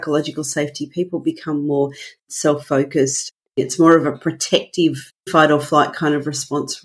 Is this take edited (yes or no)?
yes